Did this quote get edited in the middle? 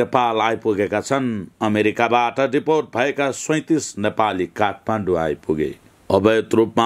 no; 0 cuts

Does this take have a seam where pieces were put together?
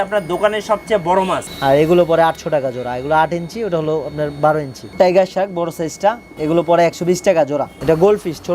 yes; 4 cuts; at 1.5 s, 4.8 s, 6.3 s, 7.8 s

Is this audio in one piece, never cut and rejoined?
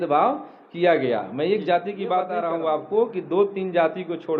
no; 1 cut; at 2.3 s

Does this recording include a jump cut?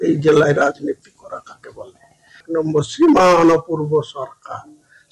yes; 1 cut; at 2.4 s

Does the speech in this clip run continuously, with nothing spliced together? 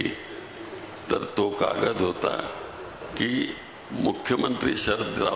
yes; 0 cuts

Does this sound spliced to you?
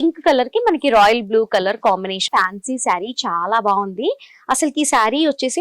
yes; 1 cut; at 2.2 s

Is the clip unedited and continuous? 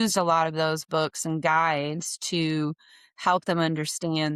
yes; 0 cuts

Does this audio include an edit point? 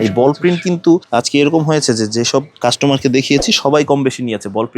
yes; 2 cuts; at 1.1 s, 2.5 s

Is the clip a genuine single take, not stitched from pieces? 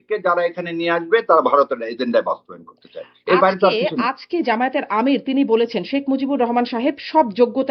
yes; 0 cuts

